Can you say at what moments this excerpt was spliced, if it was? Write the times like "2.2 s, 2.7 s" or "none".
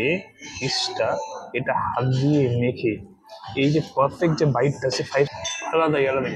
5.3 s

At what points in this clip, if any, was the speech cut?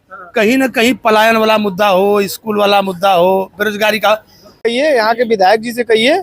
4.6 s

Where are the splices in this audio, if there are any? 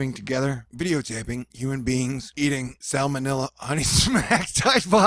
none

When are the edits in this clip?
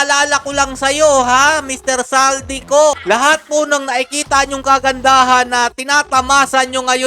3.0 s

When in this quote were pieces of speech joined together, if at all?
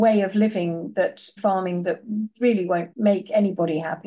1.3 s, 2.9 s

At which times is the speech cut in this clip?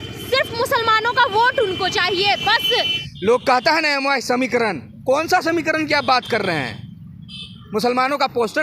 3.0 s

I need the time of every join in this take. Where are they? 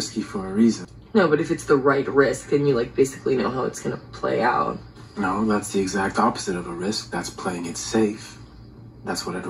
0.9 s

